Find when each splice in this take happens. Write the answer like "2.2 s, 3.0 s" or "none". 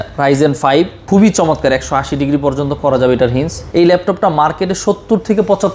1.0 s, 3.6 s